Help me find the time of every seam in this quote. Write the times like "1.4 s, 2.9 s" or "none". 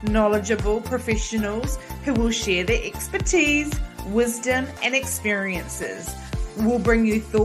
none